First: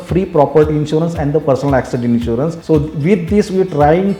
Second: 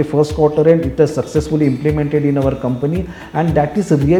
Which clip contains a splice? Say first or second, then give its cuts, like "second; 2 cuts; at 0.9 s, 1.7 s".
first; 1 cut; at 2.6 s